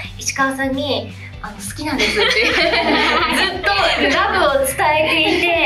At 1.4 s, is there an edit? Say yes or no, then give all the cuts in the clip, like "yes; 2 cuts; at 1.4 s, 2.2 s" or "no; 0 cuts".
no; 0 cuts